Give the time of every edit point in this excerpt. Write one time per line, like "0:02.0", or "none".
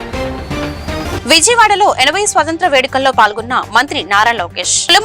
0:01.0